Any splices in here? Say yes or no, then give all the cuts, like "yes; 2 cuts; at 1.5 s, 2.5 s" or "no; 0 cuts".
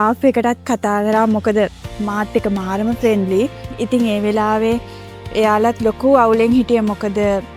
no; 0 cuts